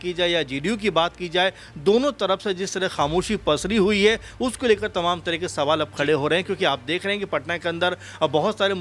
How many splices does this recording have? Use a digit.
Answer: 0